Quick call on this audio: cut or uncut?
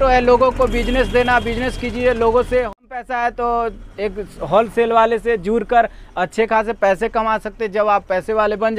uncut